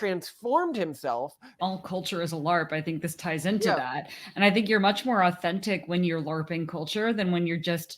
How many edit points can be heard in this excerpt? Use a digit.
1